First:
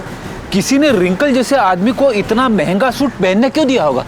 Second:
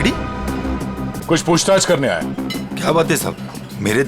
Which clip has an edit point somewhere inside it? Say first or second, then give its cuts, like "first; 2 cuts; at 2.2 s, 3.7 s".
second; 1 cut; at 1.2 s